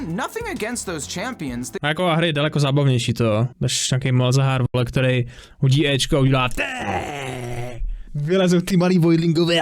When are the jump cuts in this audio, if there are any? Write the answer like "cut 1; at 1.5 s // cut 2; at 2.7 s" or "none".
cut 1; at 1.7 s